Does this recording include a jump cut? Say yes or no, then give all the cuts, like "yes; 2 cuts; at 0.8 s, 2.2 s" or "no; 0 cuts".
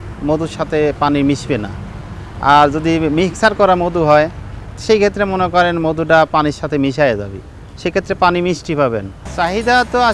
yes; 1 cut; at 9.2 s